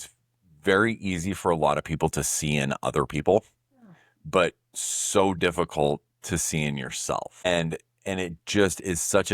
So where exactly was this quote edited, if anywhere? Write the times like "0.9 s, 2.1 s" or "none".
7.4 s

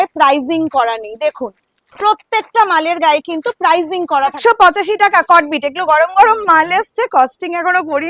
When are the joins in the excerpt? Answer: 4.4 s

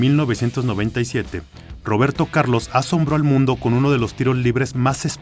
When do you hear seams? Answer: none

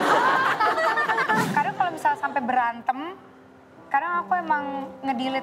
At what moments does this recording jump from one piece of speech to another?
1.5 s

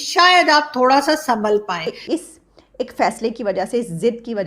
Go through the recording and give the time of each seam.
1.9 s

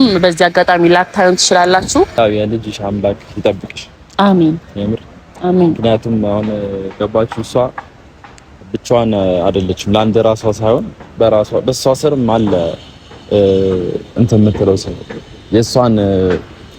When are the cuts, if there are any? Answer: 2.1 s

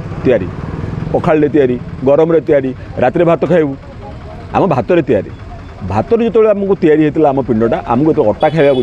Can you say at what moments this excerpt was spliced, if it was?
none

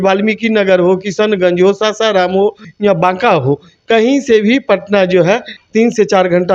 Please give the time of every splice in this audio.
2.7 s, 5.5 s

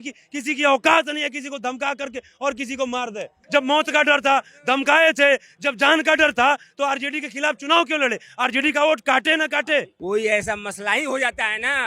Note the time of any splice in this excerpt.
3.4 s, 9.9 s

